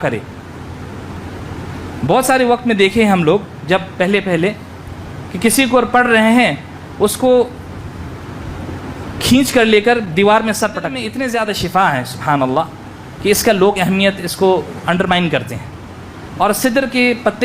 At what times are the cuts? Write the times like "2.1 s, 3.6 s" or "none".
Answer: 11.0 s